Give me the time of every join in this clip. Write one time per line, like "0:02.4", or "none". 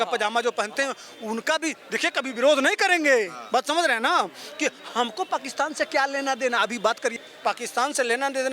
0:07.1

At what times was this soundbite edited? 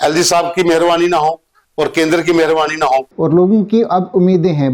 0:03.1

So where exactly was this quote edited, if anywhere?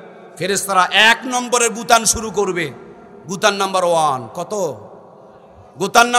none

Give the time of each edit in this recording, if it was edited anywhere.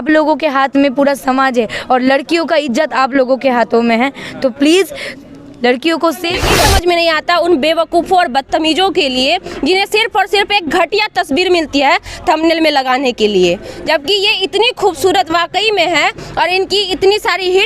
0:06.5

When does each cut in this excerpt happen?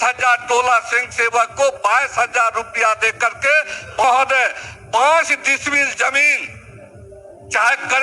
0:04.0

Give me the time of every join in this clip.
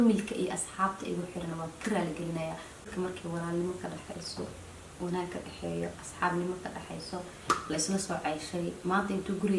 0:02.7

